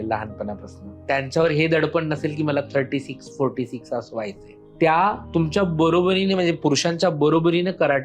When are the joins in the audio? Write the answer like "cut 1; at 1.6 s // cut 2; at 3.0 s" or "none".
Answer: none